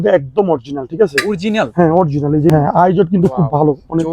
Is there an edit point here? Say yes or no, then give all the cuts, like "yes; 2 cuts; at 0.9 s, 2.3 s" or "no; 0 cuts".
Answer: yes; 1 cut; at 2.5 s